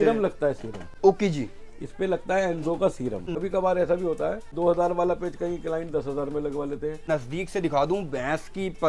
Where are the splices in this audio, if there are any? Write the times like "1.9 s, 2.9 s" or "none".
3.3 s, 4.5 s, 7.0 s